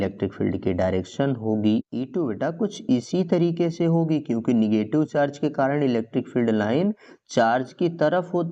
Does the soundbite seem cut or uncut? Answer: uncut